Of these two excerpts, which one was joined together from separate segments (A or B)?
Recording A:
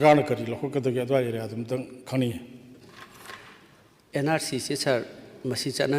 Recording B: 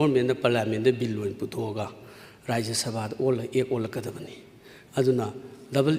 A